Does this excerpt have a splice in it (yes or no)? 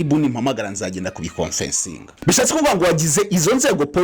yes